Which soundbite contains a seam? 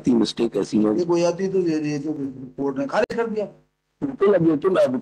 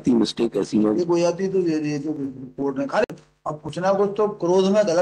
second; 1 cut; at 3.1 s

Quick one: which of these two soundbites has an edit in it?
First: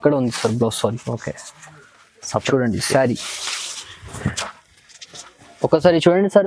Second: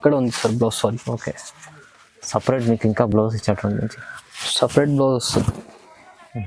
first; 1 cut; at 2.5 s

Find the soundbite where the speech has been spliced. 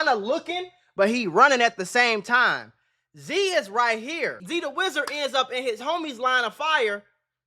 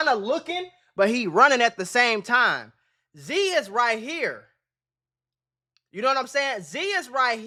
first; 1 cut; at 4.4 s

